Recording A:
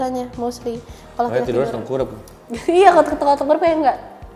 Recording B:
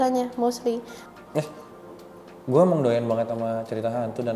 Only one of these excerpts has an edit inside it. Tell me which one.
B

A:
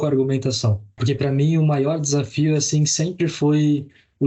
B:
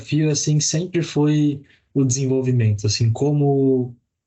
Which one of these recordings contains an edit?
A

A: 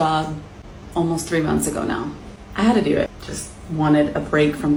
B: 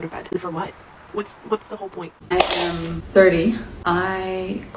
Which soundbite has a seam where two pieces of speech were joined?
B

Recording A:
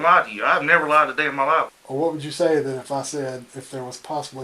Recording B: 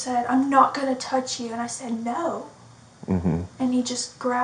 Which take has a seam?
A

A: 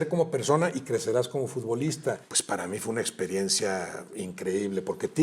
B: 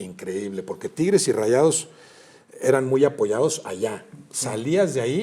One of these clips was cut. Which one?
A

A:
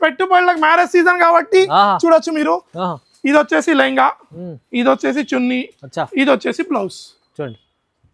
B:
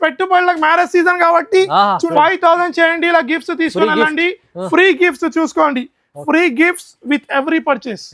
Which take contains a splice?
B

